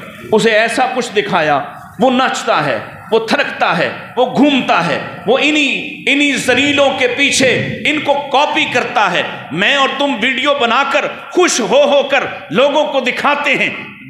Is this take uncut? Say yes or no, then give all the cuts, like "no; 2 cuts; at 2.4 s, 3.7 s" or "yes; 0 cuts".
yes; 0 cuts